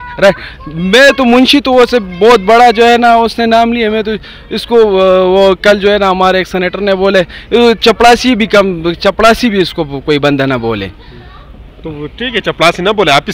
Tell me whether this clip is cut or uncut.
uncut